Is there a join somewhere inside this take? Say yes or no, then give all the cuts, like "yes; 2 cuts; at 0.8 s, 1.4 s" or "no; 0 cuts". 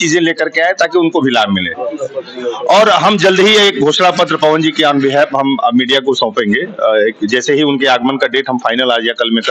no; 0 cuts